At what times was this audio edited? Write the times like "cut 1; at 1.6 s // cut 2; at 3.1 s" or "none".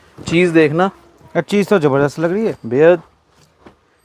none